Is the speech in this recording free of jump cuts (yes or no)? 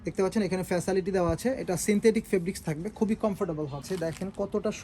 no